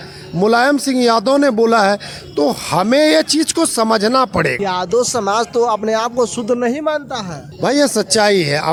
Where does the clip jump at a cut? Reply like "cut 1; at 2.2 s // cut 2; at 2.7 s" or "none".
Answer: none